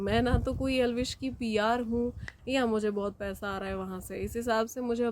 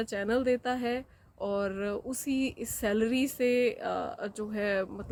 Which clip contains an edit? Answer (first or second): first